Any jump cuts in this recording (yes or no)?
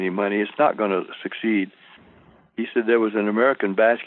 no